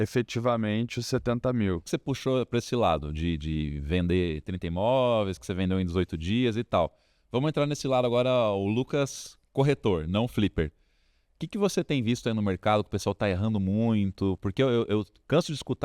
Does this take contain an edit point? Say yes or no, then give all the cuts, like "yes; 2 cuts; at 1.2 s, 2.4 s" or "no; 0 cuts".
yes; 1 cut; at 1.9 s